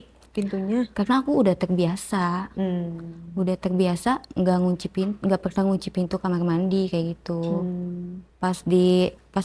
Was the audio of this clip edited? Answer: no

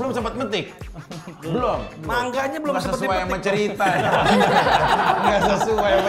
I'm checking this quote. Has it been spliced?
no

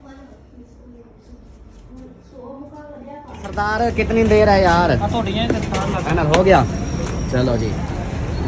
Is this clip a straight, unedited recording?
no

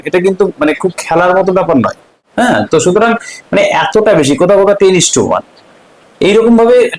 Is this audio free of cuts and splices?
no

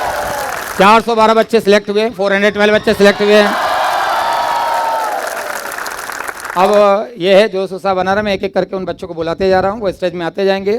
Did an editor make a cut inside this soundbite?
no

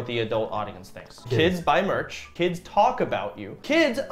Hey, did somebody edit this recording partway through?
yes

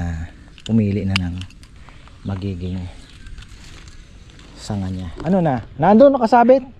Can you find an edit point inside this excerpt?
yes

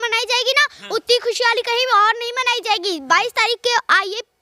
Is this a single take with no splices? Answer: yes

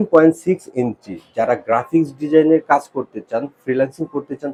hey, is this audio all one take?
yes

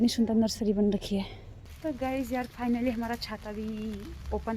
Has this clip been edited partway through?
yes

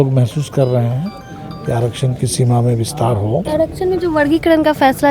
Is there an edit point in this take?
yes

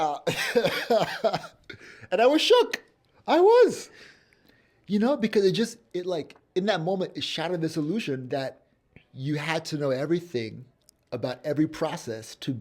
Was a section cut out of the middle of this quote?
no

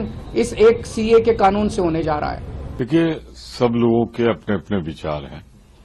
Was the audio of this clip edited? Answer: no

